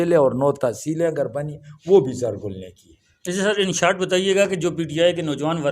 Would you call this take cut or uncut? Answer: uncut